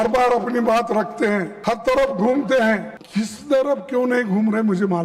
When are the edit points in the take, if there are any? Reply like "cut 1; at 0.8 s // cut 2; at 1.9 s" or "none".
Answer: cut 1; at 1.5 s // cut 2; at 3.0 s